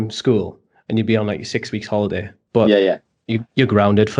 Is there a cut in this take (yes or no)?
yes